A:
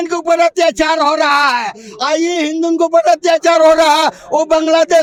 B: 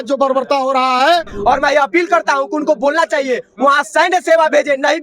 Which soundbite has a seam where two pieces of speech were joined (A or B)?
B